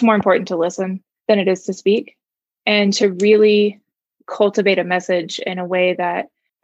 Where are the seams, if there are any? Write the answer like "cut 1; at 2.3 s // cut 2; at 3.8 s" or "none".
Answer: cut 1; at 1.1 s